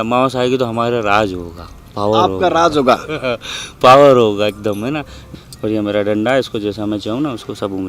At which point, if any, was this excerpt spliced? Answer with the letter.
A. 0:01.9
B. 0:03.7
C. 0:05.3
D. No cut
C